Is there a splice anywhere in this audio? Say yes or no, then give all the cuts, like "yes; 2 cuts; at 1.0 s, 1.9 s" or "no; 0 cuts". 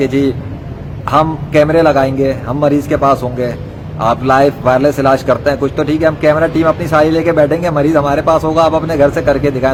no; 0 cuts